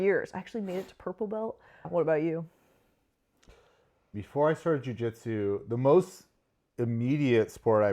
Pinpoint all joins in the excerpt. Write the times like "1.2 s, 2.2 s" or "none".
1.9 s, 4.1 s